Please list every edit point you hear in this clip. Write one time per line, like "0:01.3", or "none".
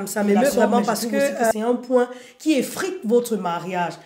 0:01.5